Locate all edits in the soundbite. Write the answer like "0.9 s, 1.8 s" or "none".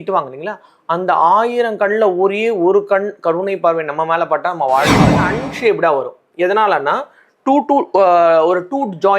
5.2 s